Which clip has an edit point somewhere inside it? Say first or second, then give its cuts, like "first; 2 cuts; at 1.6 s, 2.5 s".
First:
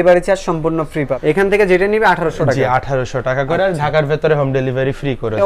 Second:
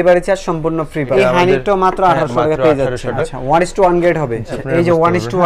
second; 3 cuts; at 1.1 s, 3.2 s, 4.6 s